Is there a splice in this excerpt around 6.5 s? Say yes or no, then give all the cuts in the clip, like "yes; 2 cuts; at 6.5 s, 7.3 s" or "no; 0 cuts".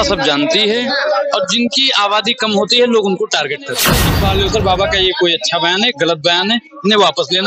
no; 1 cut; at 4.1 s